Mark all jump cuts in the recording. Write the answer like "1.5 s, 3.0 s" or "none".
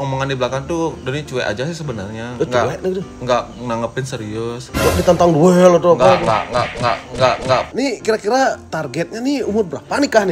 7.7 s